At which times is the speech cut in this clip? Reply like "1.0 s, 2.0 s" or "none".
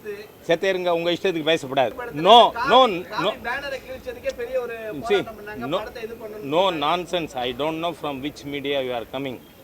2.0 s